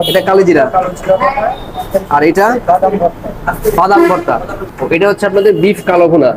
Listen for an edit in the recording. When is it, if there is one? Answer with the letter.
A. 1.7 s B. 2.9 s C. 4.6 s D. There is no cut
C